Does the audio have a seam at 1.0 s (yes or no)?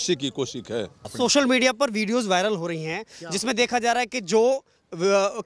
yes